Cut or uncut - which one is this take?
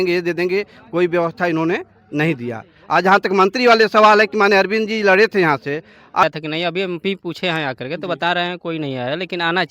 cut